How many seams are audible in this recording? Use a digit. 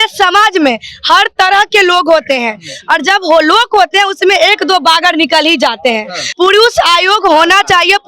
1